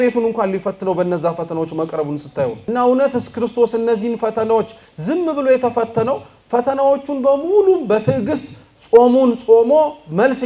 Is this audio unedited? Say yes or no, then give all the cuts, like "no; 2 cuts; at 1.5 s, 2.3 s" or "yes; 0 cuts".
no; 1 cut; at 2.6 s